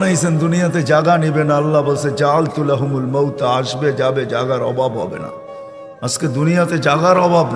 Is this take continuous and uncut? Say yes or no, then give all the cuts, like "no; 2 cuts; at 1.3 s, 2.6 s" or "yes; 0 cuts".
yes; 0 cuts